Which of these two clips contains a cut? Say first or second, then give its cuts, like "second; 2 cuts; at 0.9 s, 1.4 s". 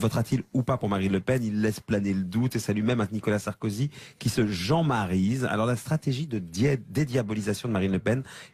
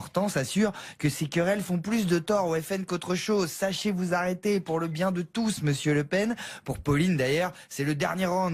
first; 1 cut; at 3.5 s